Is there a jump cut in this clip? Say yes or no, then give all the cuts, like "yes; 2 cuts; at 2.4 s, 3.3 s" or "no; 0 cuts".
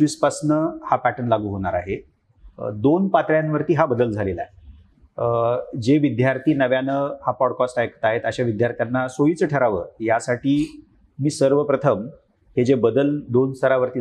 no; 0 cuts